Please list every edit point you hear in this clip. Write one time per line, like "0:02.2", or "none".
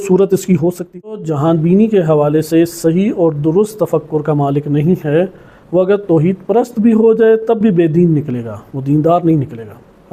0:01.1